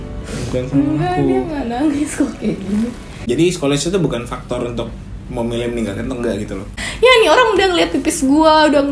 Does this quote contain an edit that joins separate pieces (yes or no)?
yes